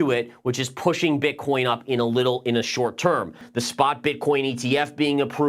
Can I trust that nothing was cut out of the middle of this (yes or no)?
no